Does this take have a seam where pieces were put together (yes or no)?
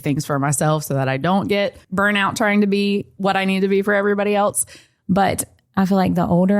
yes